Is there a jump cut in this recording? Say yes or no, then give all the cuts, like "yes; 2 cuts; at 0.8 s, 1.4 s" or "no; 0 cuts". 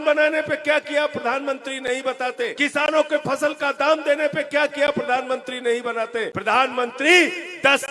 yes; 2 cuts; at 2.5 s, 6.3 s